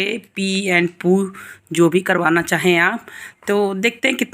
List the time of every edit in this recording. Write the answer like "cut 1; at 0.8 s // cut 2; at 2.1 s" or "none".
none